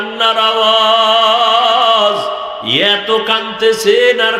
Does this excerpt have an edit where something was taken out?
yes; 1 cut; at 2.6 s

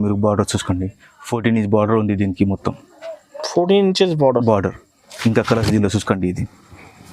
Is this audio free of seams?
yes; 0 cuts

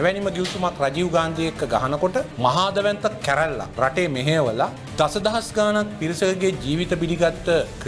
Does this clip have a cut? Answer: no; 0 cuts

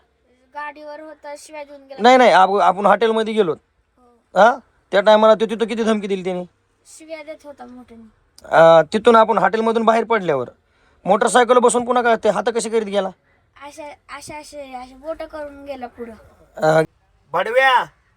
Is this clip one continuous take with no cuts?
no; 1 cut; at 16.8 s

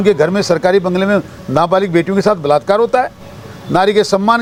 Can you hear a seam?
no; 0 cuts

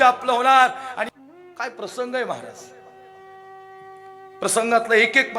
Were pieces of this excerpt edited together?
yes; 1 cut; at 1.0 s

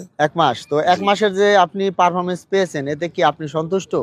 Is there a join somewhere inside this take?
no; 0 cuts

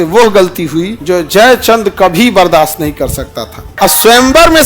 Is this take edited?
yes; 2 cuts; at 0.9 s, 3.6 s

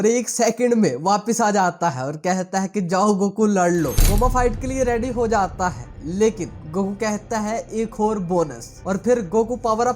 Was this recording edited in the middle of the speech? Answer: yes; 1 cut; at 4.0 s

